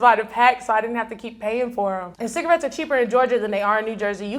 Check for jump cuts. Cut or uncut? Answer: cut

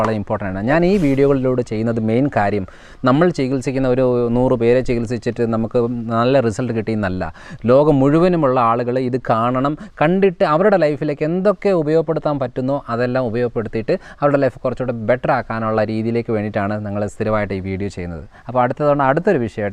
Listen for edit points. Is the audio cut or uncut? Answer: uncut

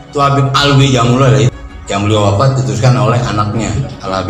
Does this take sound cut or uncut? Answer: cut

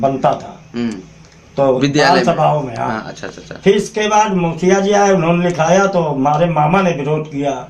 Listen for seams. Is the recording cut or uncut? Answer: uncut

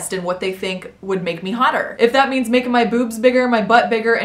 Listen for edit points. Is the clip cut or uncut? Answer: cut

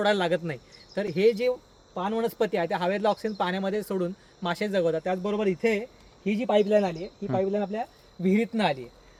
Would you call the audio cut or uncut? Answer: uncut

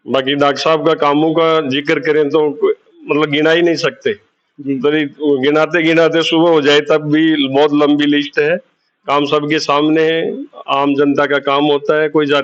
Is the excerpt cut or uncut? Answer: uncut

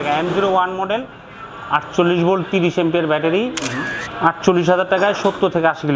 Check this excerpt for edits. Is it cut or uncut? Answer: uncut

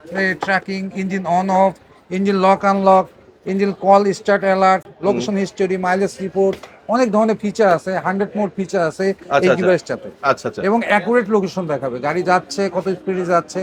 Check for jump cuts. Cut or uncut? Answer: uncut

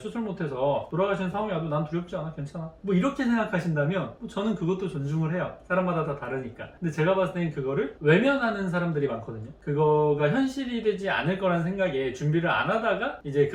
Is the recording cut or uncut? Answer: uncut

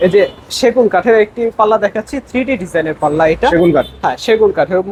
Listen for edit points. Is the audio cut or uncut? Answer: uncut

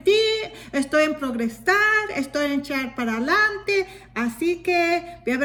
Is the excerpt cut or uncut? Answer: uncut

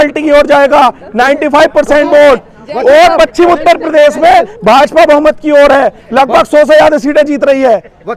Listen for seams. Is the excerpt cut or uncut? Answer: uncut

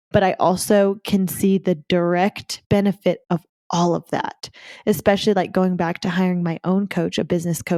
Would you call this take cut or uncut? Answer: uncut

